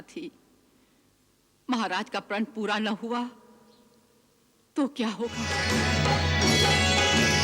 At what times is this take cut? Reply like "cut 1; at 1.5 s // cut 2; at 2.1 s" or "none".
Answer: cut 1; at 5.5 s